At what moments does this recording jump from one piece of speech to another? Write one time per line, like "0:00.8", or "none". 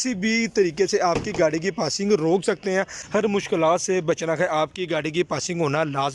0:03.0